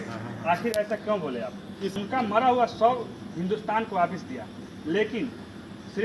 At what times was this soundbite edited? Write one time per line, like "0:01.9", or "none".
0:01.9